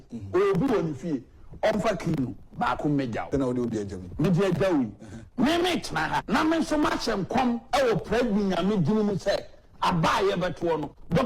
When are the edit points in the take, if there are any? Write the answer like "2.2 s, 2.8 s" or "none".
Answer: 3.3 s, 6.2 s